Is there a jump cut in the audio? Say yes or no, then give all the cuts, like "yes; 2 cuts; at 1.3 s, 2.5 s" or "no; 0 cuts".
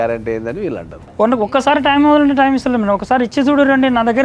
yes; 1 cut; at 1.1 s